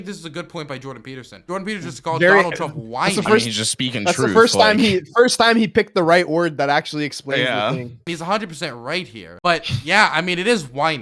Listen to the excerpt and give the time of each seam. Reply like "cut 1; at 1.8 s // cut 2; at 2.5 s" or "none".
cut 1; at 1.3 s // cut 2; at 7.9 s // cut 3; at 9.2 s